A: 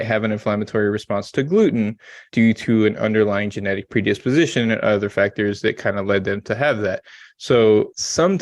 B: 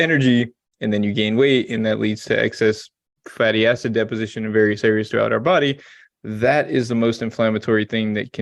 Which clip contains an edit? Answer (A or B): A